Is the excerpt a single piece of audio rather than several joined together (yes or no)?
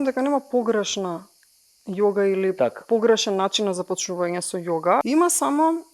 no